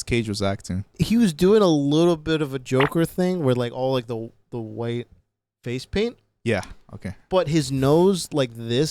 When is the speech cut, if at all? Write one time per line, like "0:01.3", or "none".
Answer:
0:00.9